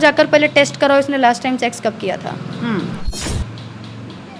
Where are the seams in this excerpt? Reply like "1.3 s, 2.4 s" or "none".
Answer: 3.2 s